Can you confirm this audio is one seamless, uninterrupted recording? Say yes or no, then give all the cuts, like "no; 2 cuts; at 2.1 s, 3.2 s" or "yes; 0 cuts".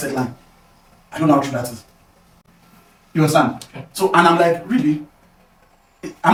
yes; 0 cuts